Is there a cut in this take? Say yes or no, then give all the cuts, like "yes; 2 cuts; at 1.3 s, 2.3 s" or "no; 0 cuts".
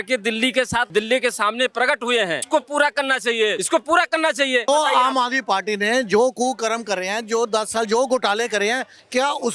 yes; 4 cuts; at 0.9 s, 2.5 s, 3.6 s, 4.7 s